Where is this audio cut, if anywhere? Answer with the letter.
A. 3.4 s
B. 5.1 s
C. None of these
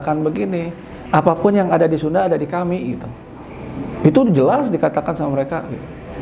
C